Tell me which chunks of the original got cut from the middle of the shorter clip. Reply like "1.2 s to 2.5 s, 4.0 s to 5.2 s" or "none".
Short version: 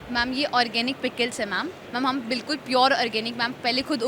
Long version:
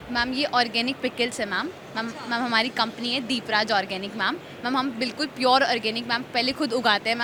1.8 s to 4.5 s